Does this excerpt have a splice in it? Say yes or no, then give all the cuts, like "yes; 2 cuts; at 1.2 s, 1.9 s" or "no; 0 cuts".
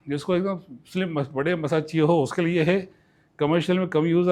no; 0 cuts